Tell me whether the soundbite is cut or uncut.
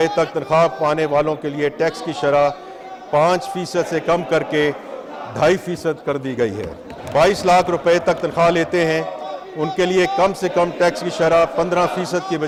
uncut